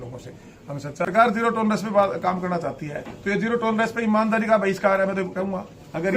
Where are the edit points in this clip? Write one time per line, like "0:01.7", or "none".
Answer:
0:01.1